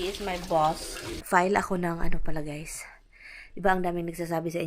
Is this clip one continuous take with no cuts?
no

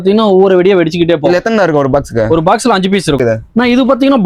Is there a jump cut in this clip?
yes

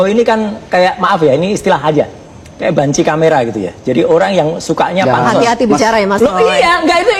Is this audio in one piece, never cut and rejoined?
yes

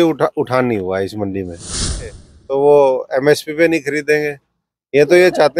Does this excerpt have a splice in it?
yes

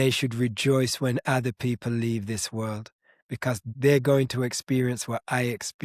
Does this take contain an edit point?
yes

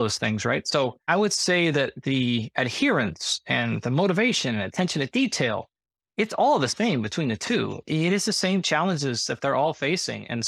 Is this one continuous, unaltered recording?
no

